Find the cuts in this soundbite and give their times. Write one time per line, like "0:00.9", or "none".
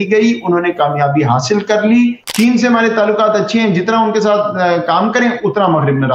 0:02.2